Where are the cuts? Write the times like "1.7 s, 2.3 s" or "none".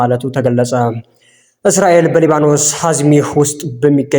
1.4 s